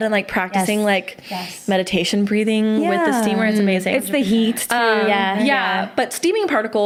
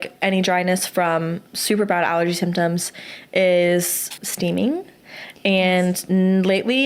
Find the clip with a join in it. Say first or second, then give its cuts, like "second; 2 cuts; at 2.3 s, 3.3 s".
second; 1 cut; at 4.2 s